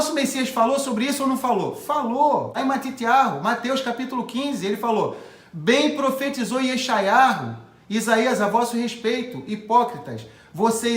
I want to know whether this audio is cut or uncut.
cut